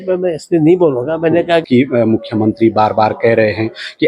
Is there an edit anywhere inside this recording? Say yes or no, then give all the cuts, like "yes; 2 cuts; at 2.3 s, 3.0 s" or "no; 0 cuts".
yes; 1 cut; at 1.7 s